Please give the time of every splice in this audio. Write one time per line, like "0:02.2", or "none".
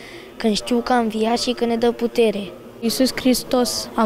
0:02.9